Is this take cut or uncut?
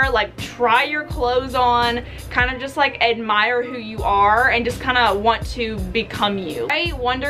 uncut